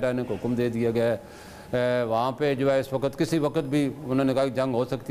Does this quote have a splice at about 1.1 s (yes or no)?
no